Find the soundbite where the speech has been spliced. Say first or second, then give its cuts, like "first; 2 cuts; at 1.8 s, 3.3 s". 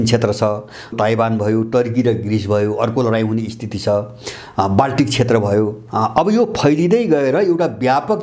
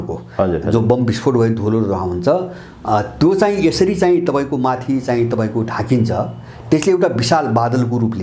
first; 2 cuts; at 0.9 s, 5.8 s